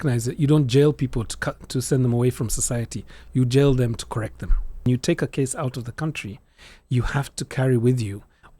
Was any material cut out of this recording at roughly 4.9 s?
yes; 1 cut; at 4.9 s

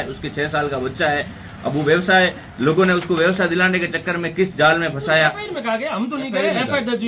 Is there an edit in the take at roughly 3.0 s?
no; 1 cut; at 5.3 s

